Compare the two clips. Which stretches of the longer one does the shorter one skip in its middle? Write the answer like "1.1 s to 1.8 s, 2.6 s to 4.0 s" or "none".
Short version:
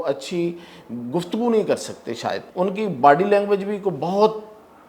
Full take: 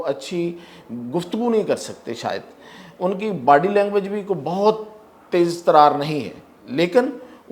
2.4 s to 2.9 s